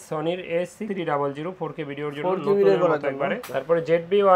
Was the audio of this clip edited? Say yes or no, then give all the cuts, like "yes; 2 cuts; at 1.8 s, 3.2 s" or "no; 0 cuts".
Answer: yes; 1 cut; at 3.4 s